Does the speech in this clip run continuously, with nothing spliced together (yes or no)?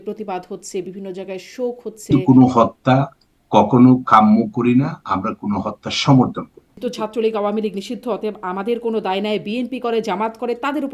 no